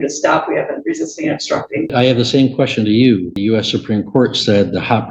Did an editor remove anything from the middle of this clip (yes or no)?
yes